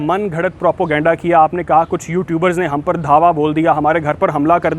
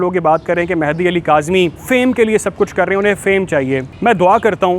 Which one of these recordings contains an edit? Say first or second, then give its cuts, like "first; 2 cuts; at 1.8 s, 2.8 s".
second; 2 cuts; at 1.8 s, 3.9 s